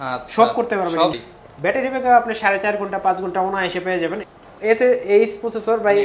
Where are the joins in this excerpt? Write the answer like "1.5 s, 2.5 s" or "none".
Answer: 1.1 s, 4.2 s